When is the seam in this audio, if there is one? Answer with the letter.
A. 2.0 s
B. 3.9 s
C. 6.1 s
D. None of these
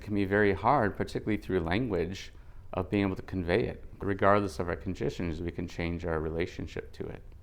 B